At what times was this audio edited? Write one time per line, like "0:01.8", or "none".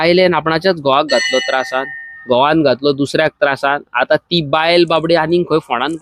none